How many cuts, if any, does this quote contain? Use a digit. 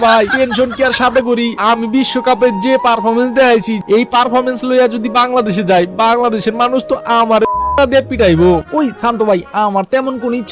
2